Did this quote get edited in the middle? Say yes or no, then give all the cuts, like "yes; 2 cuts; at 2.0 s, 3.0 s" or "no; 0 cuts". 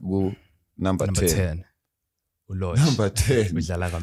no; 0 cuts